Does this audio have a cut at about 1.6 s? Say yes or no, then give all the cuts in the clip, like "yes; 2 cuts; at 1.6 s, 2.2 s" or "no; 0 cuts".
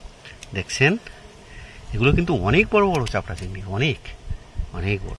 no; 0 cuts